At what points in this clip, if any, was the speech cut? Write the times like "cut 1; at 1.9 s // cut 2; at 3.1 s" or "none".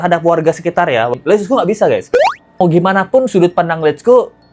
cut 1; at 1.1 s // cut 2; at 2.4 s